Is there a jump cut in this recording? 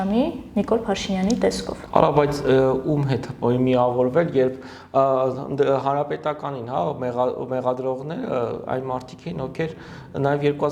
no; 0 cuts

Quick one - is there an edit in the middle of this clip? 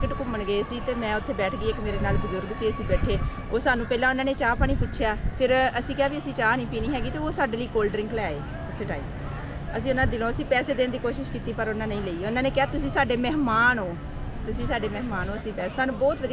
no; 0 cuts

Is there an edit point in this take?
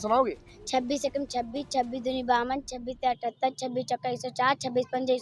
no; 0 cuts

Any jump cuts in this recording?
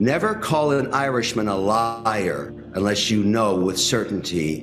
no; 0 cuts

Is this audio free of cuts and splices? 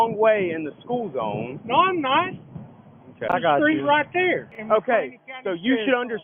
no; 2 cuts; at 3.3 s, 4.4 s

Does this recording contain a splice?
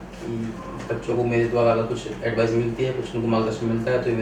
no; 0 cuts

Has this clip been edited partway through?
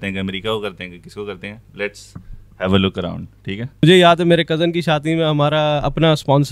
yes; 1 cut; at 3.8 s

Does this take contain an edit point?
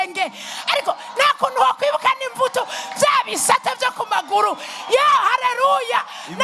no; 0 cuts

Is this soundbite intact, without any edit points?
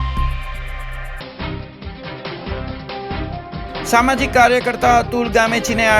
no; 1 cut; at 1.1 s

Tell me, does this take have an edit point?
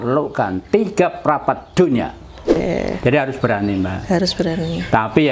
yes; 1 cut; at 2.6 s

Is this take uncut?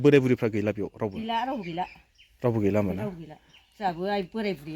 yes; 0 cuts

